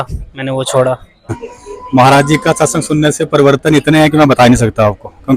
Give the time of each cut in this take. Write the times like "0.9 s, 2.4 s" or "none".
1.3 s